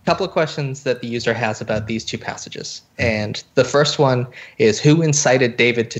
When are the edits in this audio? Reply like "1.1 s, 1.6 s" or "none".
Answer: none